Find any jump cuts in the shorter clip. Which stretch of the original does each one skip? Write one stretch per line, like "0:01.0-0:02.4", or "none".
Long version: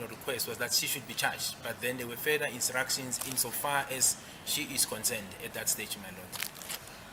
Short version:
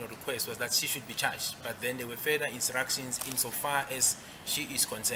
none

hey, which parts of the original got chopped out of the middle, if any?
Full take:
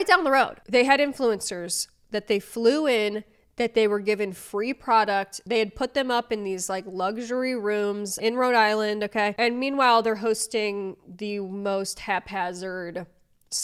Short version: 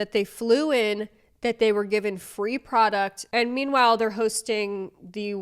0:05.4-0:09.3

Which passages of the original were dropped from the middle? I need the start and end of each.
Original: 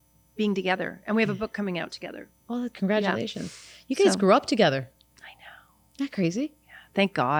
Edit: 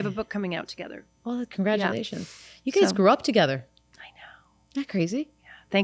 none

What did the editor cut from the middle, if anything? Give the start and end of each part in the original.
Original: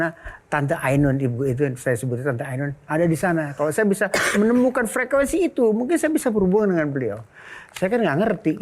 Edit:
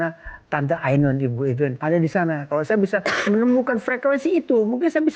0:01.8-0:02.8

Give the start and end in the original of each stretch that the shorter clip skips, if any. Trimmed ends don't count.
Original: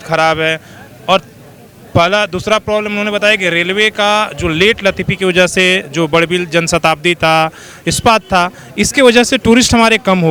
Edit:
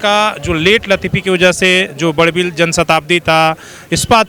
none

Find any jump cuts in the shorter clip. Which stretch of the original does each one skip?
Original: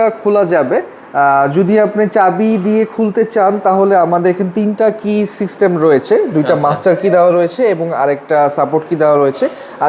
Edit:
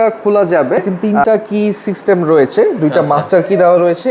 0:01.0-0:04.5

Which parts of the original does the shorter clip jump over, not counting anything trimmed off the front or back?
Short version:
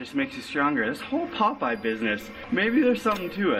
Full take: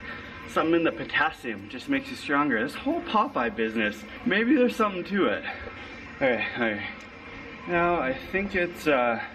none

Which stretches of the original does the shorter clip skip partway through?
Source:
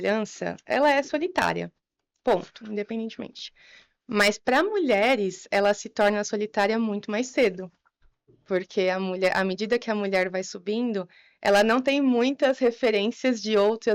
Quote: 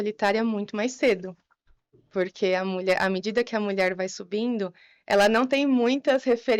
none

